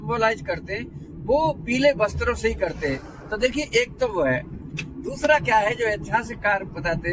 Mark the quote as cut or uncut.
uncut